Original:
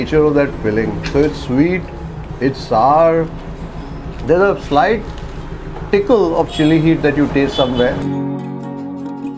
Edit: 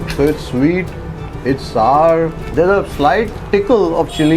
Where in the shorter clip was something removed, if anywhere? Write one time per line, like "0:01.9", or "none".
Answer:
0:02.4
0:03.4